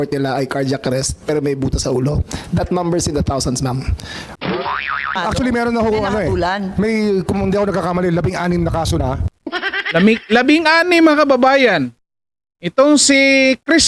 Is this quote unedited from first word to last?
no; 1 cut; at 5.1 s

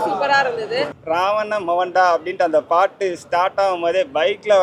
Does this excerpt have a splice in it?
yes; 1 cut; at 1.0 s

